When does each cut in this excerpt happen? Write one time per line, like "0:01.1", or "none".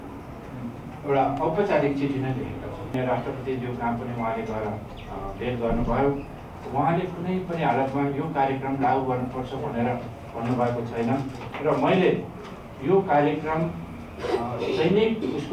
0:02.9